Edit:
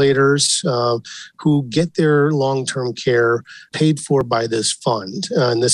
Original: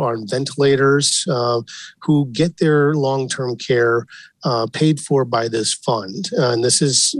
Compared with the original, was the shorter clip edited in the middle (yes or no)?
yes